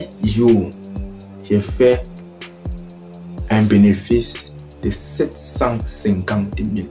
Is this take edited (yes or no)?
no